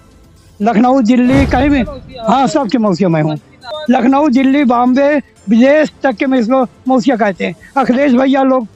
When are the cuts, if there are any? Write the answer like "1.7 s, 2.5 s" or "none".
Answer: 3.7 s